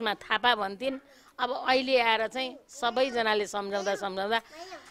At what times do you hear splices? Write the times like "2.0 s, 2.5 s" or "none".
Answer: none